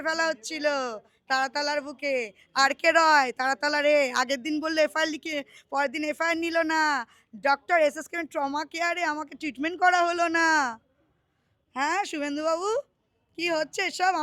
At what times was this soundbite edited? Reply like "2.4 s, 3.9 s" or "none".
none